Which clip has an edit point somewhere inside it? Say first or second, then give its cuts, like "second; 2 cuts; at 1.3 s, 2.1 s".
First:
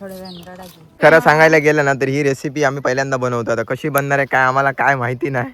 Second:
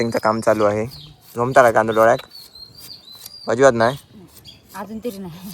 first; 1 cut; at 1.0 s